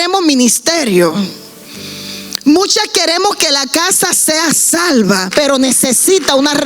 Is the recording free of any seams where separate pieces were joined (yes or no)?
no